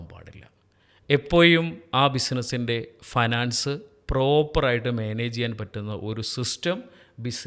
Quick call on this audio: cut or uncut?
uncut